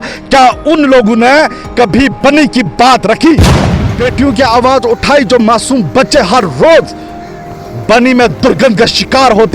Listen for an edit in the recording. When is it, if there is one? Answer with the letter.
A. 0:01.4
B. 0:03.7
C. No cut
B